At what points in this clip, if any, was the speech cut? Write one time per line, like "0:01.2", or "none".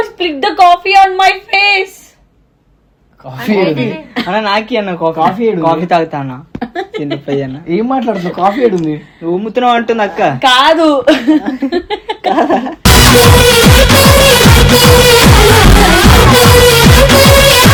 none